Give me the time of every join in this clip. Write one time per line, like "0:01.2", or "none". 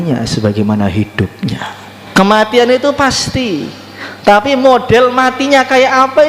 0:02.0